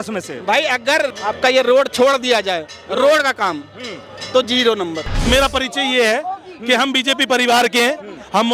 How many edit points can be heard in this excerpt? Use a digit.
2